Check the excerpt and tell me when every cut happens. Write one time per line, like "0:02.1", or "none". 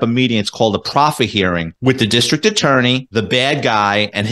0:01.7
0:03.0